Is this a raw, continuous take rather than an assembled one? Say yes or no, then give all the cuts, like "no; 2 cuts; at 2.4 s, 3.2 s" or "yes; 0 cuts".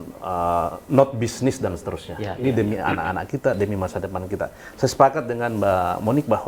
yes; 0 cuts